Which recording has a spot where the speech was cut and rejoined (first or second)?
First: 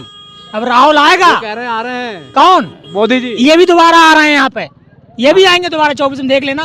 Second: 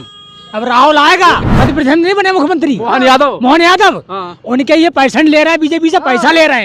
second